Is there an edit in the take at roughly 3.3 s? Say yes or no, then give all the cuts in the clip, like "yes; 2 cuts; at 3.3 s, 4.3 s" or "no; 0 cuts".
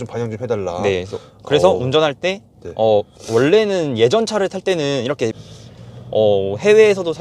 no; 1 cut; at 5.5 s